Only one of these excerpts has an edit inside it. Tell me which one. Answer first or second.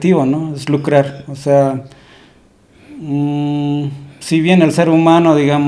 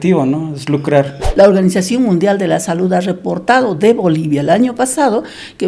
second